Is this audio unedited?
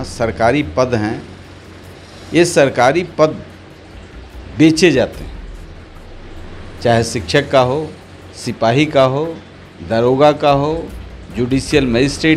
yes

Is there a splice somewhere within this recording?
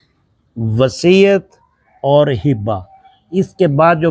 no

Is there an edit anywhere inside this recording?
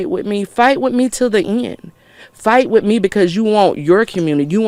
no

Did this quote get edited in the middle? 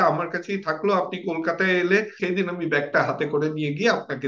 yes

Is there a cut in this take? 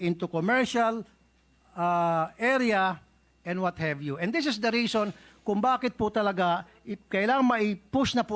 no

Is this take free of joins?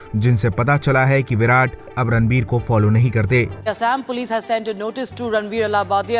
no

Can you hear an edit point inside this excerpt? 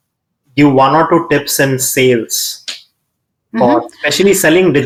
no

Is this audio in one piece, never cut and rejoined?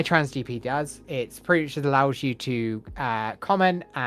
no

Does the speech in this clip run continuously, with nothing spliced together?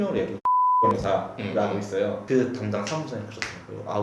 no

